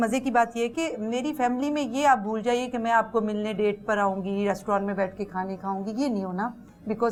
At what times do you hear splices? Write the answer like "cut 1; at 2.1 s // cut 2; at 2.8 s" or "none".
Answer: none